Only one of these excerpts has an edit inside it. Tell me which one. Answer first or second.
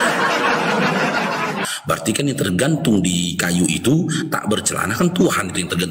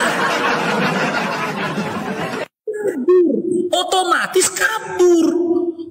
first